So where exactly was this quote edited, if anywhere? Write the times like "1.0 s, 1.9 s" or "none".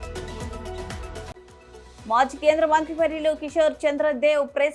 1.3 s